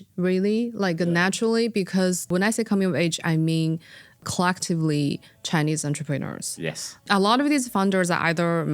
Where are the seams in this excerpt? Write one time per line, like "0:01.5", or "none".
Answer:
0:02.3
0:04.2
0:07.1